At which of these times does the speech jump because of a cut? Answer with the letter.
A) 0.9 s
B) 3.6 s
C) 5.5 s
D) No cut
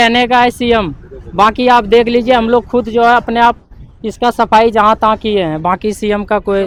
D